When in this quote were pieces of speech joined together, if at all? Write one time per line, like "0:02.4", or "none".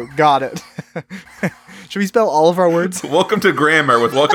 0:03.0